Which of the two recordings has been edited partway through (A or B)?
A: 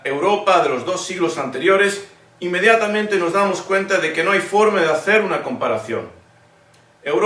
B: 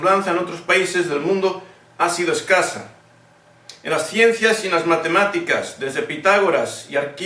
A